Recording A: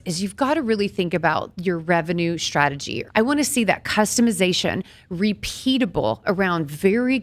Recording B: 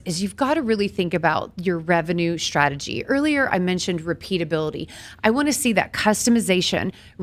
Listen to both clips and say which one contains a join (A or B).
A